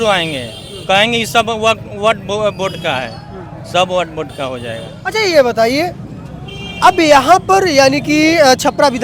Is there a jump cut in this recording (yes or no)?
no